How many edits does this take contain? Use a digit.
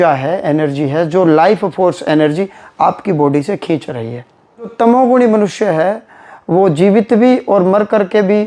1